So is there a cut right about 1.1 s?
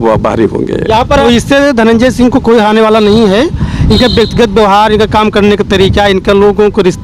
yes; 1 cut; at 1.1 s

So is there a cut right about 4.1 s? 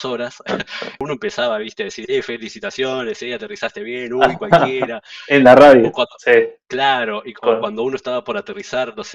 no; 1 cut; at 1.0 s

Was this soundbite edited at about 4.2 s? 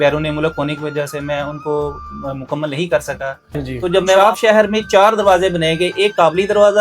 yes; 1 cut; at 4.2 s

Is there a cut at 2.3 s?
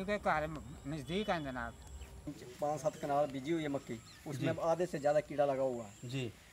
yes; 1 cut; at 2.3 s

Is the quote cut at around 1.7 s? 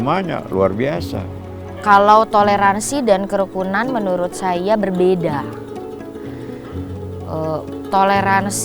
yes; 1 cut; at 1.7 s

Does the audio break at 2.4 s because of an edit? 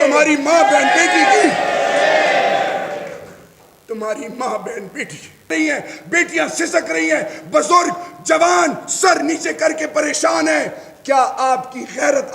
no; 1 cut; at 5.5 s

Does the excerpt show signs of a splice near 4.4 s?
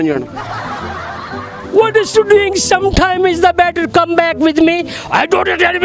no; 1 cut; at 1.5 s

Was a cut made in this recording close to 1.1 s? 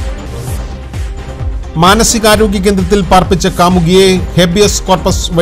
yes; 1 cut; at 1.1 s

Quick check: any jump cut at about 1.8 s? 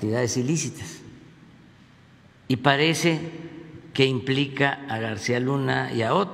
no; 0 cuts

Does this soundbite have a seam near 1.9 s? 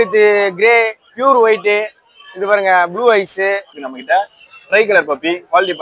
no; 1 cut; at 3.7 s

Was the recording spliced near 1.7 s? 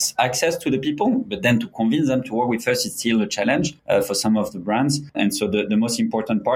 no; 2 cuts; at 3.8 s, 5.1 s

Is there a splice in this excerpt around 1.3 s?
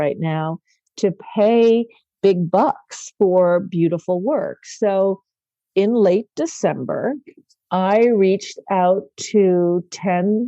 no; 0 cuts

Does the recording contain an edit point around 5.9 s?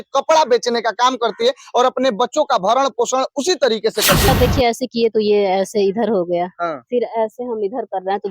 no; 1 cut; at 4.3 s

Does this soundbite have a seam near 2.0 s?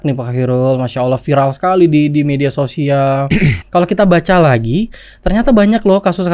no; 1 cut; at 3.6 s

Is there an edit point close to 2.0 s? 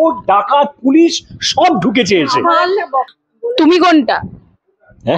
no; 1 cut; at 3.2 s

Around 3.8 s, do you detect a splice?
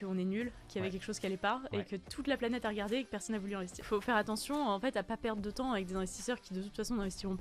yes; 1 cut; at 3.8 s

